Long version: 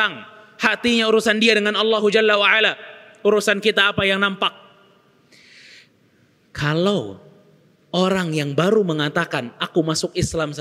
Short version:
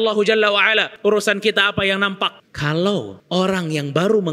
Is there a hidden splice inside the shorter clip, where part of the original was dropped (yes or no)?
yes